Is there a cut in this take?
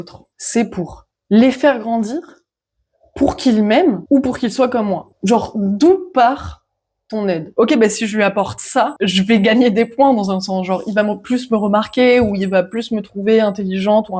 yes; 2 cuts; at 5.1 s, 7.5 s

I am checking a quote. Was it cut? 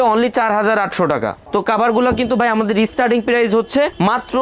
yes; 1 cut; at 1.4 s

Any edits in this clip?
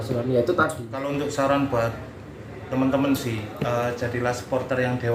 yes; 1 cut; at 0.9 s

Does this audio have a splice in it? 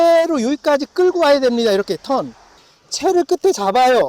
yes; 1 cut; at 2.6 s

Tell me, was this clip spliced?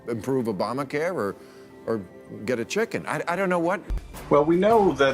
yes; 1 cut; at 4.1 s

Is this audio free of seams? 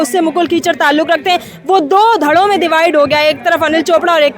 yes; 0 cuts

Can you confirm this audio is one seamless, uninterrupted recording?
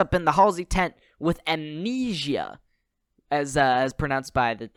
yes; 0 cuts

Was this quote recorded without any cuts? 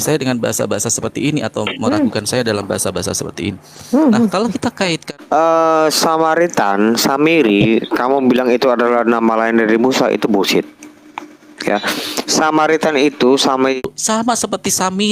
no; 2 cuts; at 5.1 s, 13.8 s

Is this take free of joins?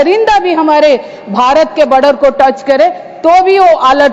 yes; 0 cuts

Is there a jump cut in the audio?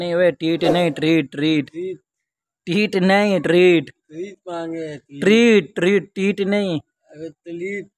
no; 0 cuts

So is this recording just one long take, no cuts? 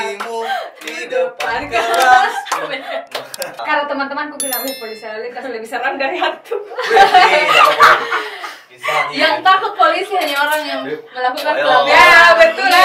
no; 1 cut; at 3.6 s

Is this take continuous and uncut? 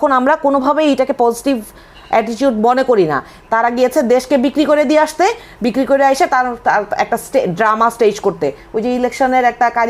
no; 1 cut; at 3.3 s

